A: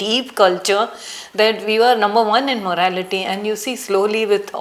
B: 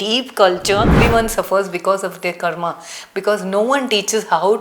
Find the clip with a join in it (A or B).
B